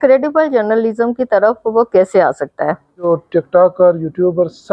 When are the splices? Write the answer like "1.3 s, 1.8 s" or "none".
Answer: 3.1 s